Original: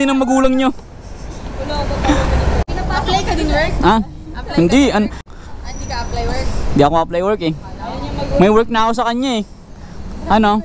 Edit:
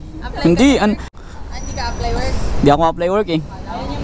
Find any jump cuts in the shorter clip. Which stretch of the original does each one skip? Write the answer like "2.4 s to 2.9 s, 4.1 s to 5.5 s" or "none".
none